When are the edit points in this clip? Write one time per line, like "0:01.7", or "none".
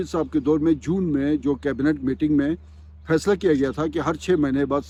none